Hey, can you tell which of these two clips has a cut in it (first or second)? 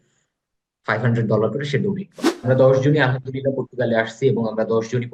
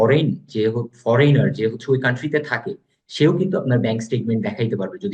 first